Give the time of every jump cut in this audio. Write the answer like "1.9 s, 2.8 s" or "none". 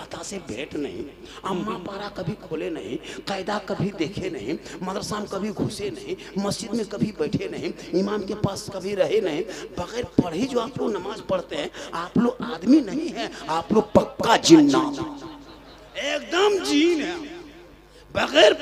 none